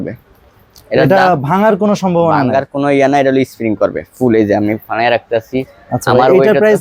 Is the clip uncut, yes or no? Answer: yes